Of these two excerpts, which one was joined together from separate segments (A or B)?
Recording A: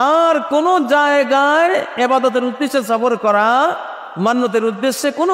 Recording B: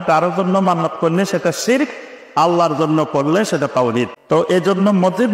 B